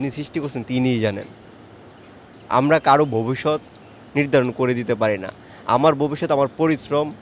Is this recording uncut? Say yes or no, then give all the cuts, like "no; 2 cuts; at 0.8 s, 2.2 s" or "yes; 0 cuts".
yes; 0 cuts